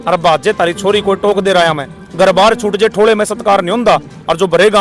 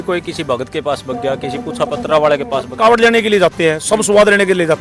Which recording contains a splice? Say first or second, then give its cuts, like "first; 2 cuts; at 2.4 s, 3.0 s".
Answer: second; 1 cut; at 2.7 s